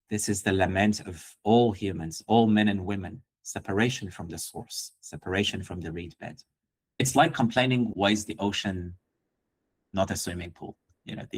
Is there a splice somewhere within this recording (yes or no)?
yes